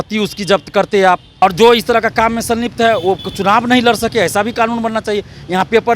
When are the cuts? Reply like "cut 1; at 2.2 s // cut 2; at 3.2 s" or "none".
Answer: cut 1; at 1.4 s